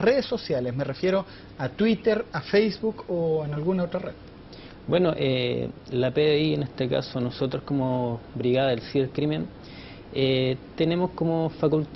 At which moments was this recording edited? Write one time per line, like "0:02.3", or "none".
0:02.4